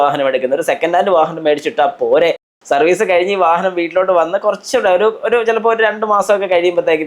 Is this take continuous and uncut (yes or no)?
no